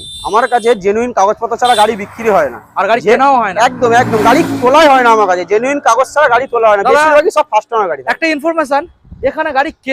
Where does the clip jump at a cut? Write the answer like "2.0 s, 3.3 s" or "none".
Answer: none